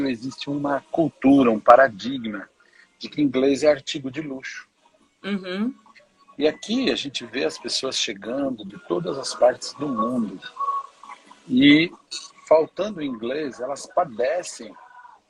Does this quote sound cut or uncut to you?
uncut